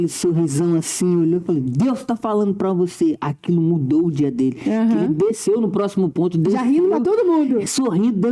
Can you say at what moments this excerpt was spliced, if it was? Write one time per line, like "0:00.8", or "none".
none